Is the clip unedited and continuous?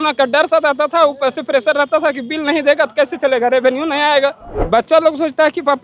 no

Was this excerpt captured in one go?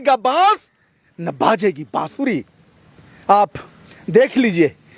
yes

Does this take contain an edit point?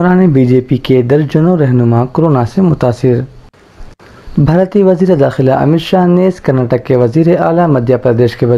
no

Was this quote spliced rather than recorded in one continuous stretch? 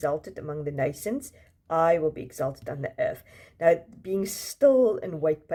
no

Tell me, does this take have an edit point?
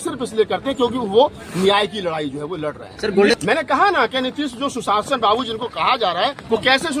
yes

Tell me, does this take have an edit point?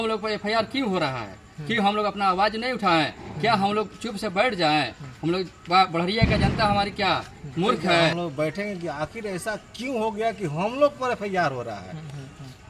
yes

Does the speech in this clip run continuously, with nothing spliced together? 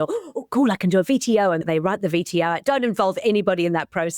no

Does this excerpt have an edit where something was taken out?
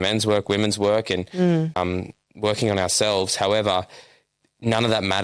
yes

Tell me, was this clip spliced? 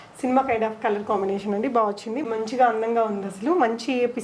yes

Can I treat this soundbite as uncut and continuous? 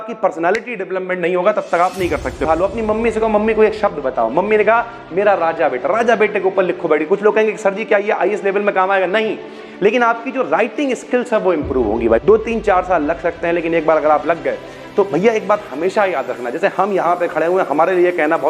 no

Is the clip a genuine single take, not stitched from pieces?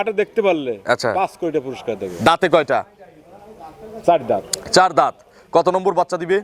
yes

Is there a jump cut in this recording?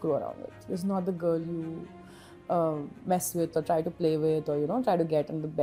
no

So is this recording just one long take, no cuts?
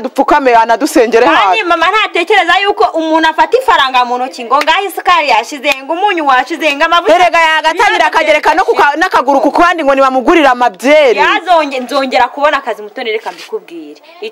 yes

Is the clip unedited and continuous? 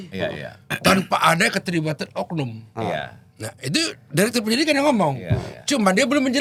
yes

